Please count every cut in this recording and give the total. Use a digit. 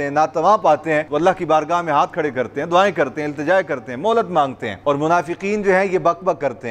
2